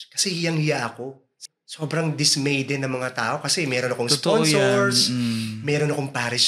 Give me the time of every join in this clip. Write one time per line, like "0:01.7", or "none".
0:01.3